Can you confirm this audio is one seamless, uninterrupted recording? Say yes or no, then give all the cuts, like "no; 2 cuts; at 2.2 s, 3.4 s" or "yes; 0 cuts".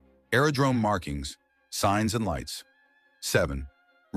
yes; 0 cuts